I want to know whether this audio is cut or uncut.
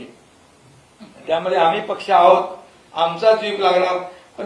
uncut